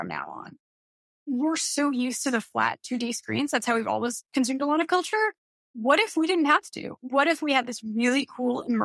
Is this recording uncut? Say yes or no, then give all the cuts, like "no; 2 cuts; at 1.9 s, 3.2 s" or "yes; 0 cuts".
no; 1 cut; at 1.1 s